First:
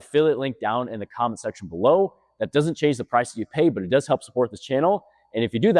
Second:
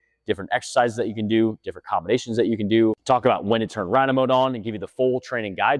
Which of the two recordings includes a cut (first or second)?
second